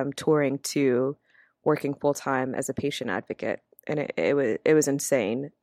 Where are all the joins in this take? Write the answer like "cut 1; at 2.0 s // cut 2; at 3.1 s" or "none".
none